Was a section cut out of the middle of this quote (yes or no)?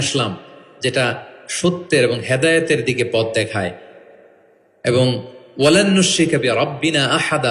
no